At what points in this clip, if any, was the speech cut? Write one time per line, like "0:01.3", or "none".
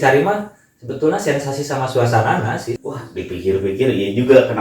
0:02.7

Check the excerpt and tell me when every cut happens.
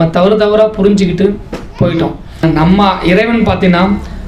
0:02.4

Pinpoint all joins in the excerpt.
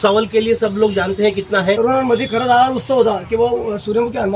0:01.8

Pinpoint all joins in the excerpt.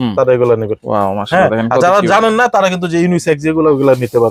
none

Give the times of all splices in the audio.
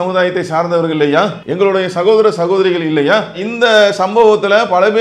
0:01.4

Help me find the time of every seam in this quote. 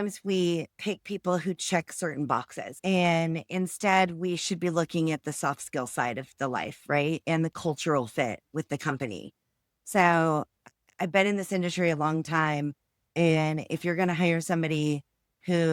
0:02.6

